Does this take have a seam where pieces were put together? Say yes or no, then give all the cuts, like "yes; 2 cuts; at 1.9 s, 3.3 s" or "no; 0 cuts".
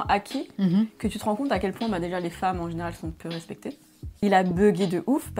yes; 1 cut; at 4.2 s